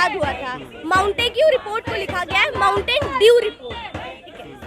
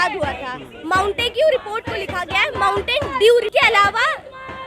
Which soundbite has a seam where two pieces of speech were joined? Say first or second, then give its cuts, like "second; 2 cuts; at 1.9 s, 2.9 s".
second; 1 cut; at 3.5 s